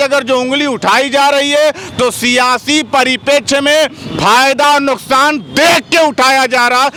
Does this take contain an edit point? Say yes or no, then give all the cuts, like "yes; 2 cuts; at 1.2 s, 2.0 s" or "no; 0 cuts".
no; 0 cuts